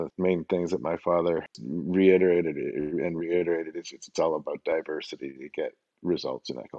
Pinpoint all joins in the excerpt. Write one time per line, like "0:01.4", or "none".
0:01.6